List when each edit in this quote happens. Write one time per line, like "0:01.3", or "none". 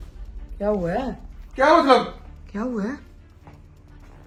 none

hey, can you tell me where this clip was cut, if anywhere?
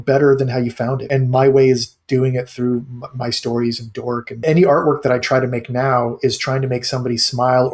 0:01.0
0:04.4

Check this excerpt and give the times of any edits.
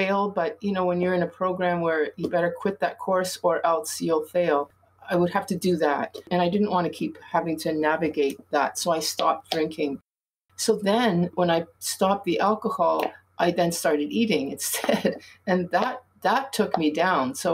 0:06.2
0:11.3

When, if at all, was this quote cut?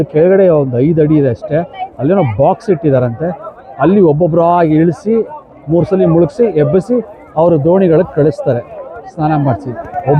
none

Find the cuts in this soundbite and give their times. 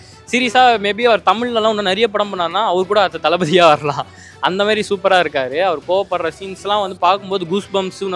none

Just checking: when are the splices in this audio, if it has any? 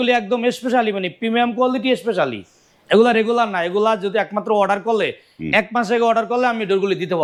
none

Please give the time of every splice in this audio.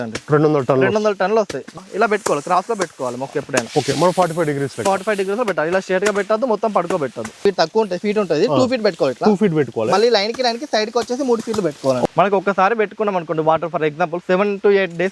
0:01.8
0:07.5
0:12.0

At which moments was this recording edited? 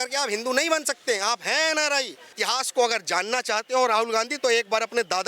0:02.4

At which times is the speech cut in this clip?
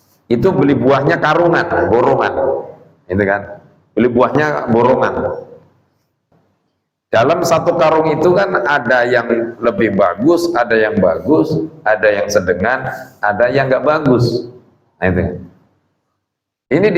0:06.2

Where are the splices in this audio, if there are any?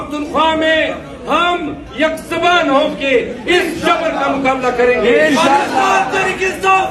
none

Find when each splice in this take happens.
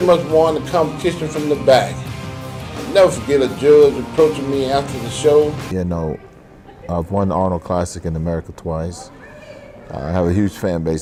none

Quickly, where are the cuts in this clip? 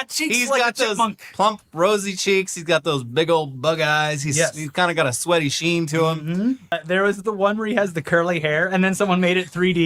0:06.8

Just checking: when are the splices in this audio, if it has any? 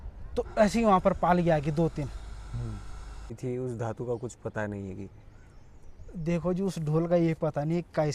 0:03.4

